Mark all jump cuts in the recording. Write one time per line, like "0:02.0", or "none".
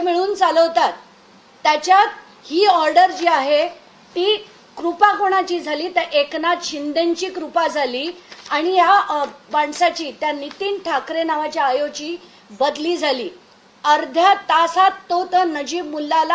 none